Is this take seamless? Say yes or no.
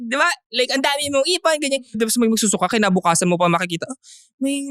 no